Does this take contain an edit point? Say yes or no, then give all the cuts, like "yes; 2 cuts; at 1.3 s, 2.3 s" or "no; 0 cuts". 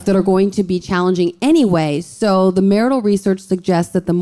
no; 0 cuts